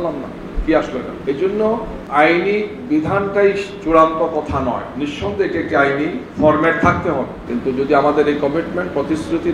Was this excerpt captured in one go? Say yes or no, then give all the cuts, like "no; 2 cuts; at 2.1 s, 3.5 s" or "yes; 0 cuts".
no; 4 cuts; at 1.1 s, 2.0 s, 6.2 s, 7.4 s